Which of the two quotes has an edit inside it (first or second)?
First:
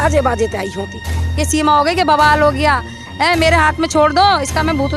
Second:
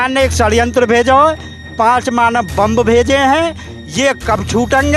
first